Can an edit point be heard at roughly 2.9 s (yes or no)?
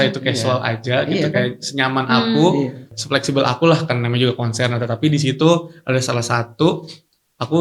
yes